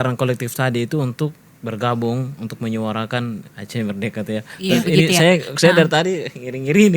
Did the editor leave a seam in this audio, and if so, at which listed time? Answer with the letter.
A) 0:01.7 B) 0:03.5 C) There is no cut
B